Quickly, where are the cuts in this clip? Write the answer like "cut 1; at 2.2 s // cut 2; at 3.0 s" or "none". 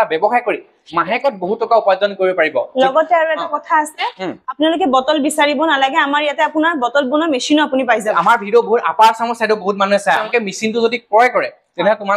cut 1; at 8.0 s // cut 2; at 10.2 s